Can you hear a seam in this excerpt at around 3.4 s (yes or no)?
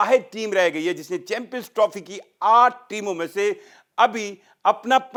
no